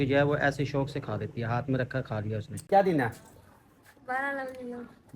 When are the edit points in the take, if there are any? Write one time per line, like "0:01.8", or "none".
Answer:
0:02.7